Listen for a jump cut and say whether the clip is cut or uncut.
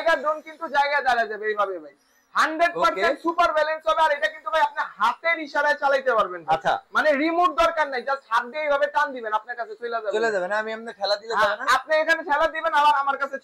uncut